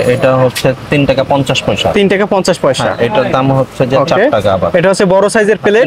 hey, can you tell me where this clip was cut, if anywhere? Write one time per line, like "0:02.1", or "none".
none